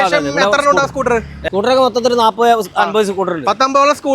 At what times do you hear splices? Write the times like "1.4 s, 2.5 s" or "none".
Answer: 1.5 s